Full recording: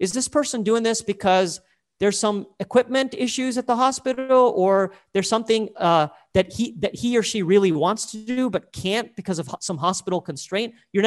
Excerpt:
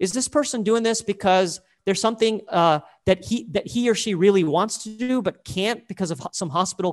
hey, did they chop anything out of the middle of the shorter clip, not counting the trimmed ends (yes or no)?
yes